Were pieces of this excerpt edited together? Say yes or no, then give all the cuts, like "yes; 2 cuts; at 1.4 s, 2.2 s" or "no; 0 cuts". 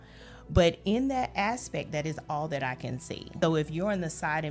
yes; 1 cut; at 3.3 s